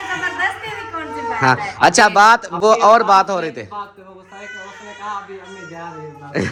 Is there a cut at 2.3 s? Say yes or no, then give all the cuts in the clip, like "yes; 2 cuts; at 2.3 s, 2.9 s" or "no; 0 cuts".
no; 0 cuts